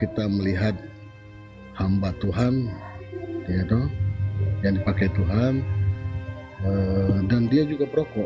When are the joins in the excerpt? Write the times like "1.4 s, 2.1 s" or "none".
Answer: none